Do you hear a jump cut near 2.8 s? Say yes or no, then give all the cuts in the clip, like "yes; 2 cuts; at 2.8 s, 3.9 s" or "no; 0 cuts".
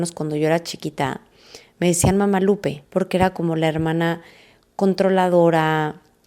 yes; 1 cut; at 2.8 s